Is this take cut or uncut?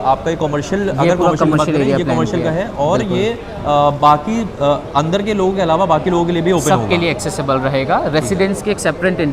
uncut